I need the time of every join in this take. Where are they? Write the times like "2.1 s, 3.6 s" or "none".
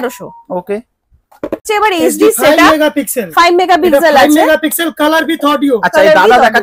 none